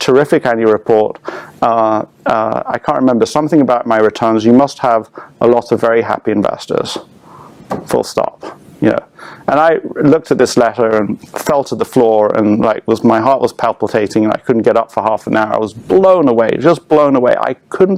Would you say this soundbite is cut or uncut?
uncut